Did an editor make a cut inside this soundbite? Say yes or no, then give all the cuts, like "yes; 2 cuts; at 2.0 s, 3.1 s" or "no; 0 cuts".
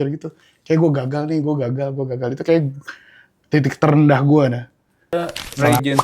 yes; 1 cut; at 5.0 s